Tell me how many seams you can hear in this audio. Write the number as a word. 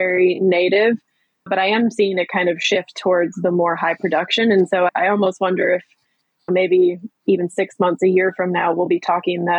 zero